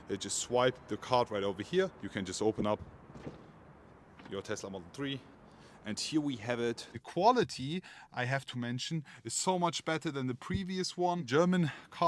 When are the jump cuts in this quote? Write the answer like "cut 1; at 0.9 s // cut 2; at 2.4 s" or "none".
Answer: cut 1; at 2.0 s // cut 2; at 5.3 s // cut 3; at 6.9 s // cut 4; at 11.2 s